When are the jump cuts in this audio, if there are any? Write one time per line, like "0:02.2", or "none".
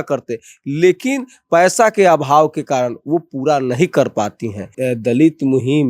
0:04.6